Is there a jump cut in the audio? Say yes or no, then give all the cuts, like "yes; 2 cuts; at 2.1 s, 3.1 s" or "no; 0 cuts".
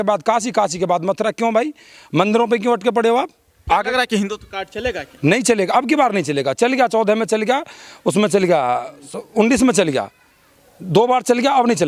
no; 0 cuts